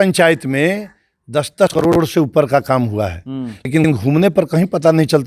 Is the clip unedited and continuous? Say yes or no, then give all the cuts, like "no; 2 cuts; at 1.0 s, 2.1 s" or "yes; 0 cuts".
yes; 0 cuts